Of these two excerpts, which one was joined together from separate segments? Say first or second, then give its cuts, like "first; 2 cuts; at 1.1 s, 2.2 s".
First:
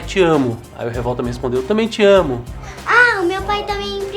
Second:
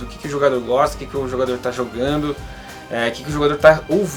first; 1 cut; at 2.9 s